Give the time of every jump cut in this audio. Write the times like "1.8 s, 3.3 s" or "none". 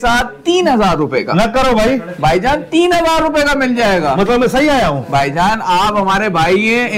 none